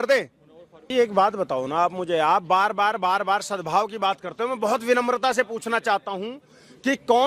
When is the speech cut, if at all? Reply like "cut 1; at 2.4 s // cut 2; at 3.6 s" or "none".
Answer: cut 1; at 0.9 s